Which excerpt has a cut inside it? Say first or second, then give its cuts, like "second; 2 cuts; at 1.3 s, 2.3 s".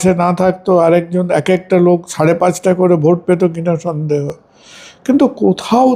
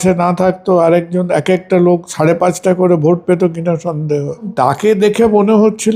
second; 1 cut; at 4.5 s